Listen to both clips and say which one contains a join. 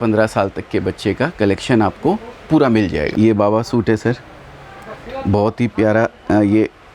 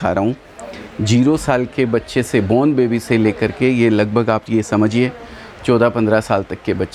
first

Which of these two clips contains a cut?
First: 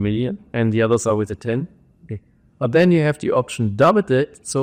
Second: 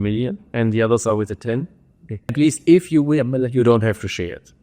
second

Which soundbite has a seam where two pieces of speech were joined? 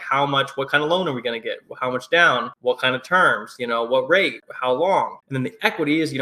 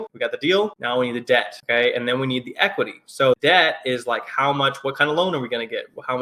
first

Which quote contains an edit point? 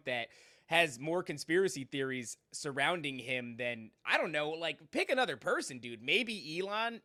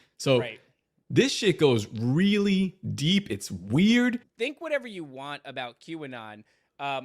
second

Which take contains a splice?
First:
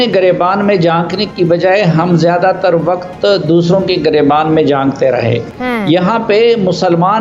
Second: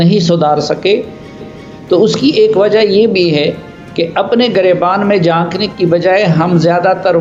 first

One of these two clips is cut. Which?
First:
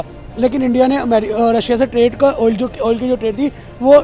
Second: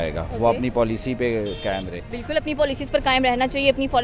second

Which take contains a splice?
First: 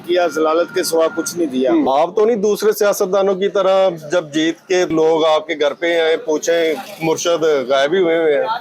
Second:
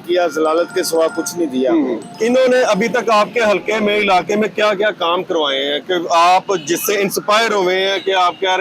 first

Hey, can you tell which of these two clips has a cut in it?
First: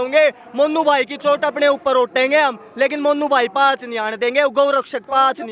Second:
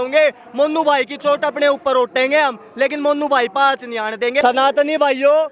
second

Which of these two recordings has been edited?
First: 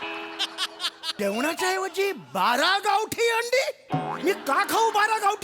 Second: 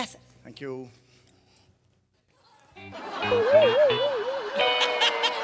first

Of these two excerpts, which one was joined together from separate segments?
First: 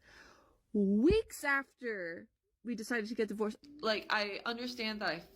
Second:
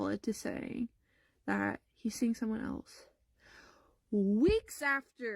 first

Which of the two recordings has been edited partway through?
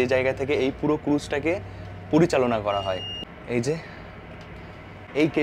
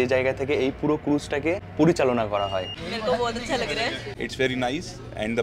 second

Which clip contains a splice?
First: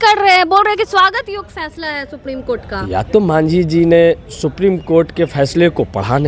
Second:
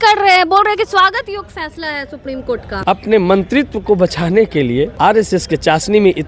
second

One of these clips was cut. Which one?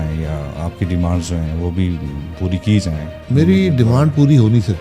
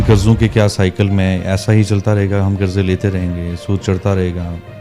first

